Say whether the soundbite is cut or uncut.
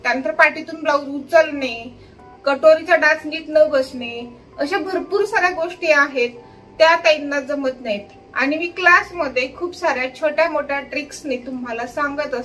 uncut